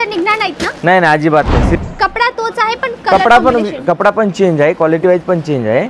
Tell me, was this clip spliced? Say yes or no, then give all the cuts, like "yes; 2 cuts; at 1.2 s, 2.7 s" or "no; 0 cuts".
yes; 1 cut; at 1.8 s